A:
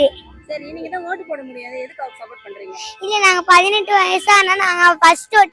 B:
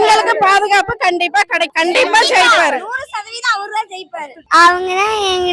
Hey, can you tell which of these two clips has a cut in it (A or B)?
B